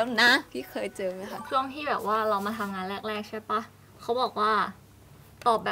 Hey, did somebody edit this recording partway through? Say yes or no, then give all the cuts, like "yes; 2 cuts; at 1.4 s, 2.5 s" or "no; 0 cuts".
yes; 1 cut; at 1.4 s